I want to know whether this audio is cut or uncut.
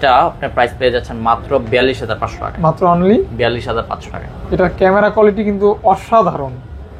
uncut